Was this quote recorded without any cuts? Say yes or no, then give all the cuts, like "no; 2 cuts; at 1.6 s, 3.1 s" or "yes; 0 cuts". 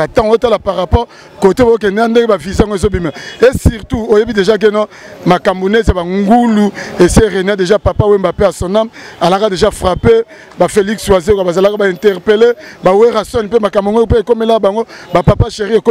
yes; 0 cuts